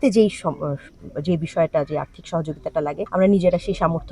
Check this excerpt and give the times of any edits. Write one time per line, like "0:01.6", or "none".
0:03.0

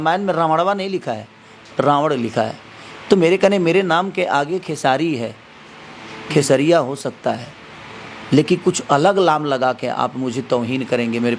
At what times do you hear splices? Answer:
none

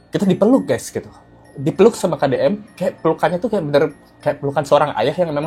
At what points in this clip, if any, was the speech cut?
none

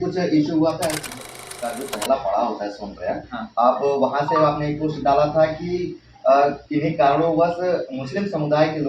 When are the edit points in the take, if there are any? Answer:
0:01.3

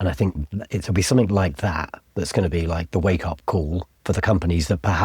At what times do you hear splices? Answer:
0:03.9

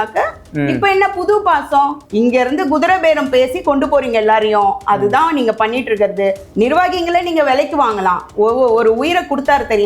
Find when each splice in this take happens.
0:02.0
0:06.4

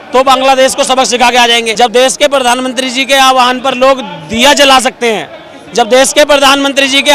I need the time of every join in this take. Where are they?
0:01.7

